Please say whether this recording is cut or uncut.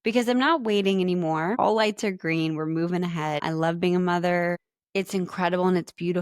cut